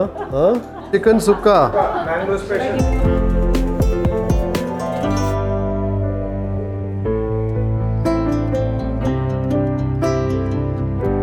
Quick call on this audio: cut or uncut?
uncut